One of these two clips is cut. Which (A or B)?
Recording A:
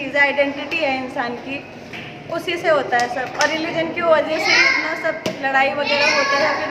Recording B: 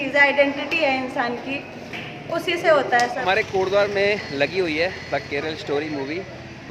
B